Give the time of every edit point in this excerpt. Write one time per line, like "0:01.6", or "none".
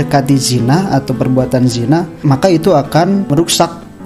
0:02.2
0:03.3

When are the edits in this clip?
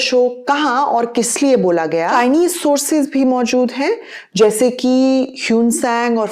0:02.1

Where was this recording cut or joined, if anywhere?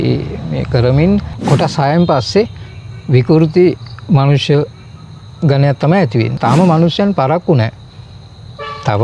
0:01.3
0:06.4

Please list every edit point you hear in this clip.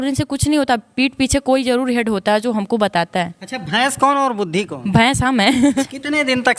0:05.6

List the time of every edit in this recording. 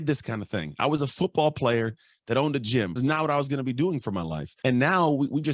0:02.9
0:04.4

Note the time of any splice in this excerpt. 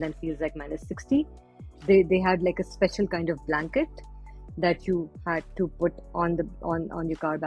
0:01.6

